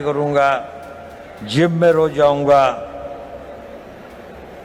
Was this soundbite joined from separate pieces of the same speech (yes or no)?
no